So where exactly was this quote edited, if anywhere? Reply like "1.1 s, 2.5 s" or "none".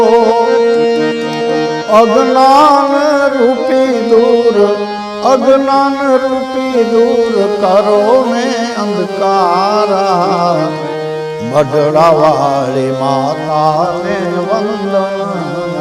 none

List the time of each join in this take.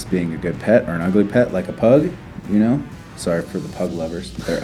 none

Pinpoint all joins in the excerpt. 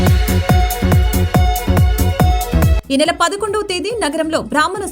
none

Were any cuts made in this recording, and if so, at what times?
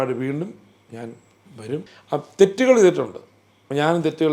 1.9 s

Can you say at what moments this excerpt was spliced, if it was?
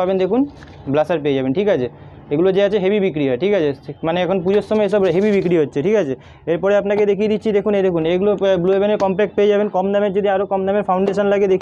none

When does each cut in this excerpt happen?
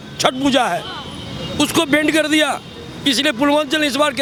none

